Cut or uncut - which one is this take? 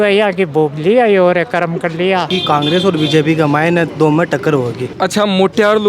cut